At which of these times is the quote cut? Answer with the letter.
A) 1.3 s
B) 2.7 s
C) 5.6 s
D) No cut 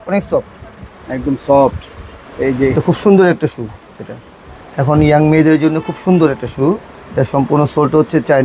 B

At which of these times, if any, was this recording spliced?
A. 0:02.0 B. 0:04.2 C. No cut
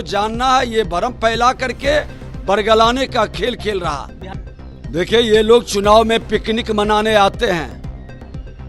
B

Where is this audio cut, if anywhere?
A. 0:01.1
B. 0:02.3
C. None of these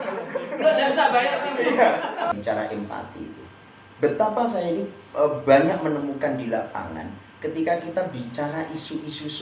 B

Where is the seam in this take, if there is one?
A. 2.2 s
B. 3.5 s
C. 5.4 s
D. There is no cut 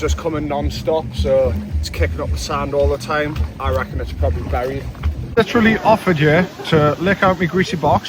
C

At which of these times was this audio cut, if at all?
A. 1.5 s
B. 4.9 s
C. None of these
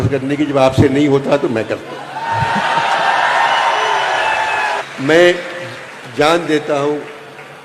B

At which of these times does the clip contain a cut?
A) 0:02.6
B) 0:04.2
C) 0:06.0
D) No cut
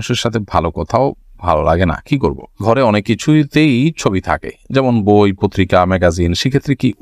A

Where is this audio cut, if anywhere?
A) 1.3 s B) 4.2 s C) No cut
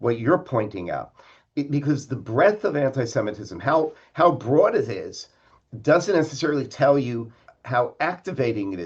C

